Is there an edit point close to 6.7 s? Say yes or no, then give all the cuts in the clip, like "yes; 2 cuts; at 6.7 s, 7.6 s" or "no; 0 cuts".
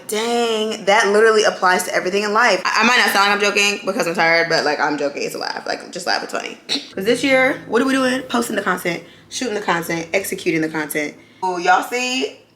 yes; 3 cuts; at 2.6 s, 6.7 s, 11.2 s